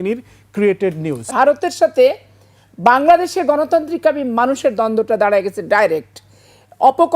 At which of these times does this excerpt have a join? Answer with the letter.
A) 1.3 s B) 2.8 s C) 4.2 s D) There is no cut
A